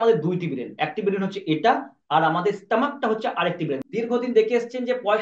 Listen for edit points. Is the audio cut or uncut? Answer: cut